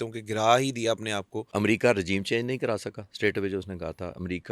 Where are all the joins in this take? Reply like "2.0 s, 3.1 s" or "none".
1.4 s